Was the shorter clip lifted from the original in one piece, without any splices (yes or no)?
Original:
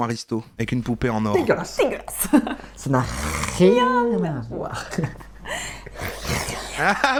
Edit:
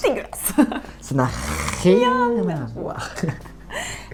yes